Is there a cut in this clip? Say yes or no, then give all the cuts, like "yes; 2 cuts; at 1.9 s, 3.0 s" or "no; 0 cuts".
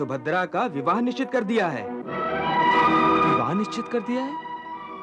no; 0 cuts